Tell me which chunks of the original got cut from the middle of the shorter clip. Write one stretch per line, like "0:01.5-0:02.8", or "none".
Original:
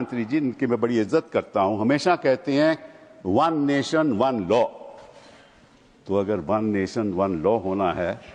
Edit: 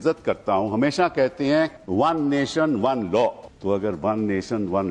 0:02.9-0:03.2
0:04.8-0:05.9